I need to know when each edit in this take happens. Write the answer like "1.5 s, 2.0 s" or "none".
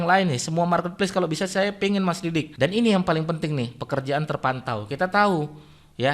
2.5 s